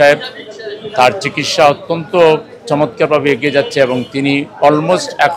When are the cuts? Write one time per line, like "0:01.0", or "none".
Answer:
none